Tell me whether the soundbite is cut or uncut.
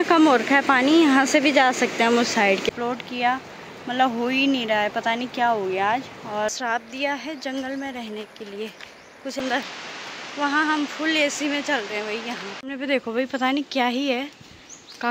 cut